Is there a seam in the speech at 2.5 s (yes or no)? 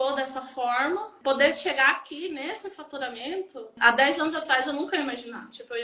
no